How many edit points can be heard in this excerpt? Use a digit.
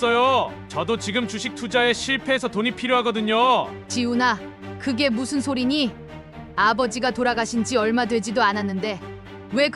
1